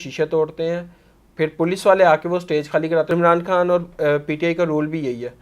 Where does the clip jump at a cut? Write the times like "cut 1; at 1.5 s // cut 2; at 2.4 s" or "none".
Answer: cut 1; at 3.1 s